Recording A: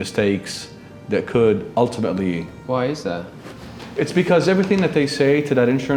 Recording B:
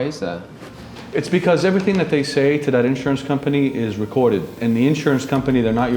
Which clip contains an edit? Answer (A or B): B